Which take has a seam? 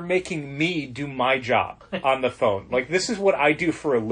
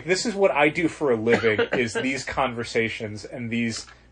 first; 1 cut; at 1.8 s

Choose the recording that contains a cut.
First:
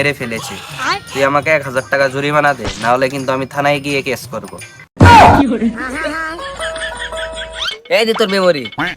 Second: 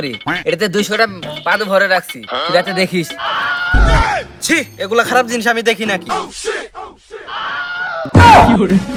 first; 1 cut; at 7.6 s

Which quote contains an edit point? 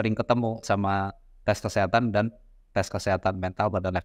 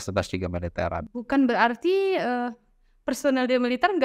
second; 1 cut; at 1.0 s

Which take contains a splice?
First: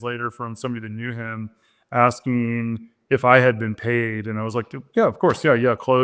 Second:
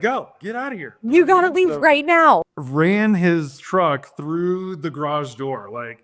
second; 1 cut; at 2.6 s

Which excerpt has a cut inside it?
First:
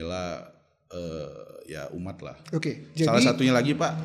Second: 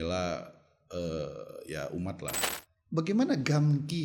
second; 1 cut; at 2.3 s

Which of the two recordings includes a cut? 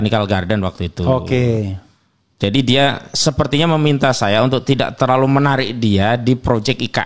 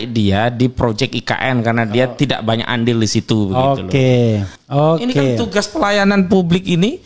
second; 1 cut; at 4.6 s

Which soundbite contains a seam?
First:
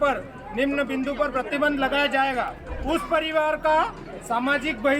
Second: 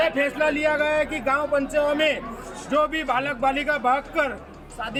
first; 1 cut; at 2.7 s

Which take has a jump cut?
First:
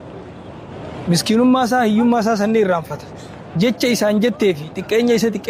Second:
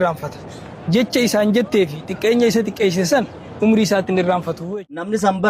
second; 1 cut; at 4.6 s

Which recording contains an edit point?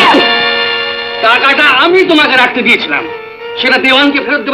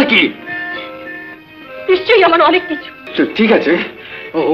second; 1 cut; at 3.0 s

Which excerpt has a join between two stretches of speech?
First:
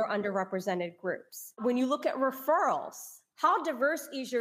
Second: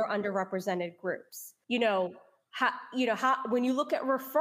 first; 1 cut; at 1.6 s

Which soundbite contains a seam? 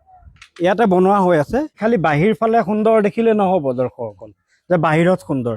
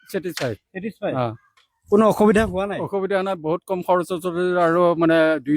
first; 1 cut; at 1.8 s

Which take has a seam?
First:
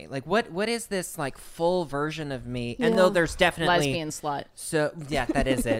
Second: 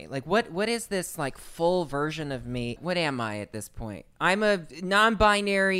second; 2 cuts; at 2.7 s, 4.7 s

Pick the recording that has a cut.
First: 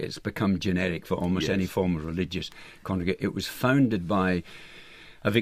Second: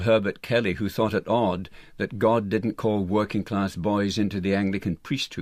first; 1 cut; at 3.8 s

